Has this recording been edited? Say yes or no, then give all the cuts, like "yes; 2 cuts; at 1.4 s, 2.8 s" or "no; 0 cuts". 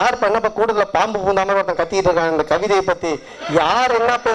no; 0 cuts